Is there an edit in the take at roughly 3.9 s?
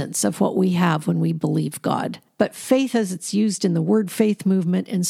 no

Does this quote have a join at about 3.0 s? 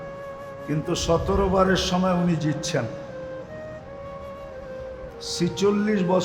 yes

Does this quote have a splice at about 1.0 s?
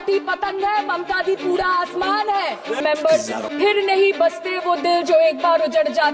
no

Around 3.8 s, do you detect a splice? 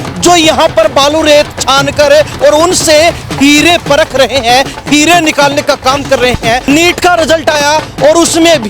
no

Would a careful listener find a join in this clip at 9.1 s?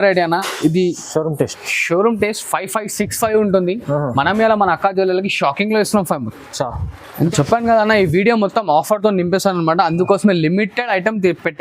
no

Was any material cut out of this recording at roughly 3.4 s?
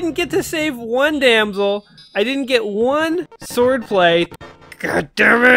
yes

